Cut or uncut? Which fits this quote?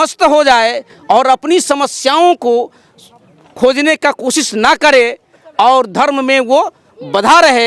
uncut